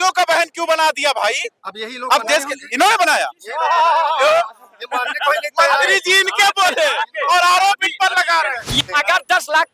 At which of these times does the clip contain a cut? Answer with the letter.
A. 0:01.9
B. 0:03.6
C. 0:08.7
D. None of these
C